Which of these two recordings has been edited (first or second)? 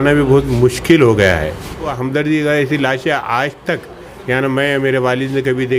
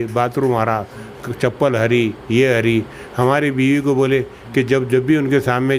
first